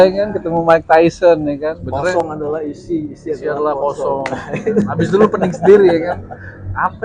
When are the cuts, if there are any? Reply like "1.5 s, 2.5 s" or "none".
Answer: 2.2 s